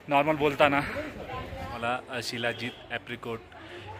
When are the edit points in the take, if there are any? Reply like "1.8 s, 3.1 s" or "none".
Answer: 1.8 s